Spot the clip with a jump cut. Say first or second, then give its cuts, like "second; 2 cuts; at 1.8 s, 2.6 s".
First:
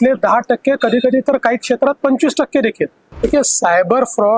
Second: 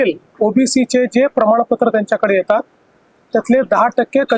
first; 1 cut; at 3.1 s